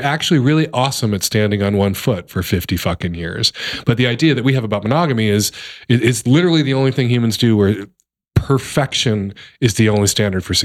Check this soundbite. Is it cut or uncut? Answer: uncut